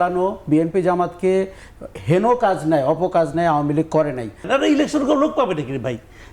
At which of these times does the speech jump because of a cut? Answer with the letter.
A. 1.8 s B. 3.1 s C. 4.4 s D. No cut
C